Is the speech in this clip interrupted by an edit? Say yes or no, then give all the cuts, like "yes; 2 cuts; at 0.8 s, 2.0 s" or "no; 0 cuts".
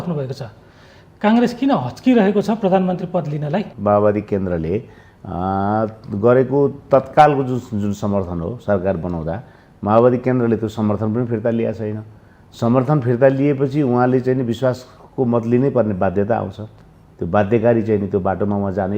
yes; 1 cut; at 3.7 s